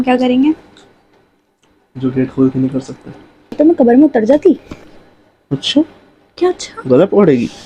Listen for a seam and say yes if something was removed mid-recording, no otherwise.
yes